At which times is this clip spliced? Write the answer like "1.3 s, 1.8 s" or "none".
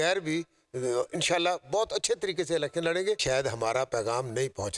3.2 s